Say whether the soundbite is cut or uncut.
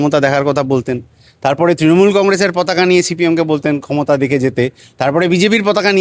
uncut